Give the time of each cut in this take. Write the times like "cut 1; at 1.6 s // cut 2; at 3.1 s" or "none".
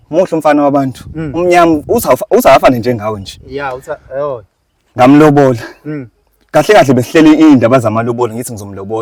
none